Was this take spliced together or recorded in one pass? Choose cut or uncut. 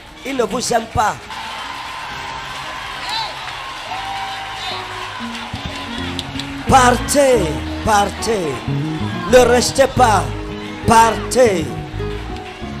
cut